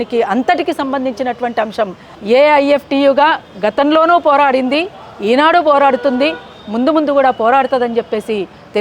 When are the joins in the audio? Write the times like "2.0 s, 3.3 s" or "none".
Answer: 2.1 s